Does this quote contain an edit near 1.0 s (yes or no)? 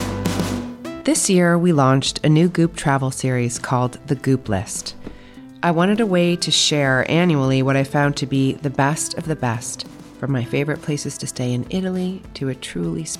yes